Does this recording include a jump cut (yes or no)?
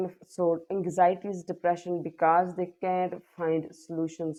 no